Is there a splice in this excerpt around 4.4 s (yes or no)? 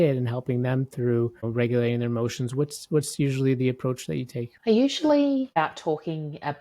yes